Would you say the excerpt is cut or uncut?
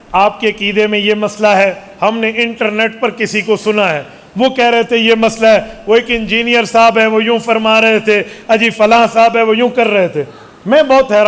uncut